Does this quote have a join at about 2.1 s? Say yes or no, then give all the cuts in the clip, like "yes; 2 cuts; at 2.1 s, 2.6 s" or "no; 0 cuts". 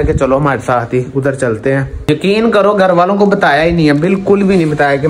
yes; 1 cut; at 2.1 s